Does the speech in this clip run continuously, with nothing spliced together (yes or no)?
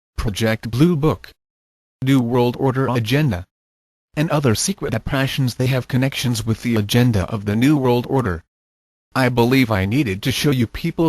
no